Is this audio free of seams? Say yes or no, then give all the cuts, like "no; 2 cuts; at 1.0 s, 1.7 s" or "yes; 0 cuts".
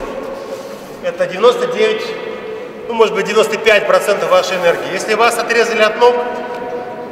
yes; 0 cuts